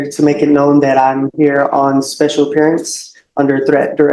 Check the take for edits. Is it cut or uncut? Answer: uncut